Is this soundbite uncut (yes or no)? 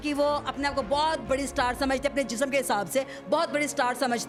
yes